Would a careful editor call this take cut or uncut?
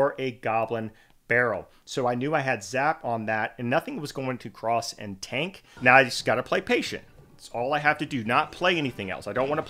cut